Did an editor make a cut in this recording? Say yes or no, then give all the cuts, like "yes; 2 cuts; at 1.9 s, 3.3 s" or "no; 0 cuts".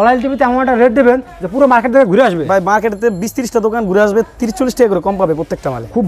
no; 0 cuts